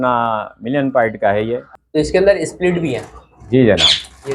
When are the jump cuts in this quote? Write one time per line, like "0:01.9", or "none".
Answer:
0:01.8